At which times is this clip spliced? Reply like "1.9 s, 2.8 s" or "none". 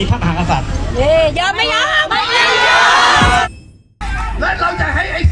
3.5 s

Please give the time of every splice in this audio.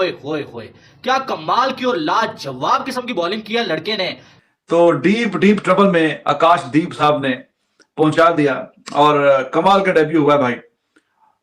4.3 s

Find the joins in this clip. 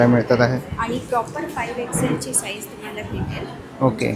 none

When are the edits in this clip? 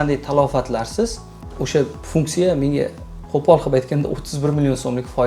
none

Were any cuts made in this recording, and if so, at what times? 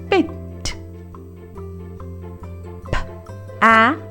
none

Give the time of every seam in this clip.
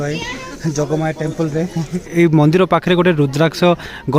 2.1 s

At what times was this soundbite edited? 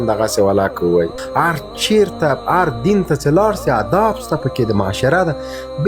1.2 s

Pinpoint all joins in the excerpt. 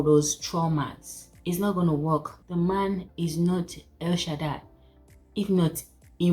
2.4 s

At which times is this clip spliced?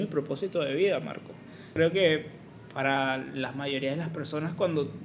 1.7 s

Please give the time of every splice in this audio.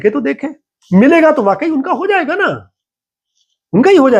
none

